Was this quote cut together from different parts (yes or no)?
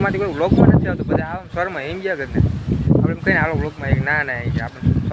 no